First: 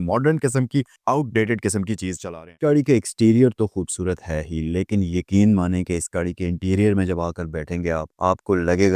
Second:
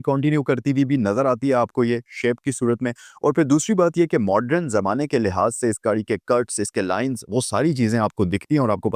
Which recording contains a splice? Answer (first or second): first